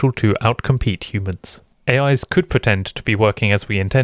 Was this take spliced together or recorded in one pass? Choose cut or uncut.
cut